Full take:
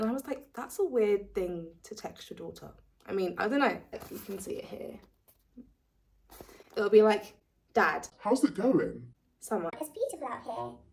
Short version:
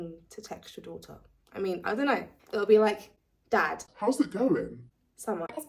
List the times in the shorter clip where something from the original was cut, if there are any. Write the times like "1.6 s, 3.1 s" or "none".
2.4 s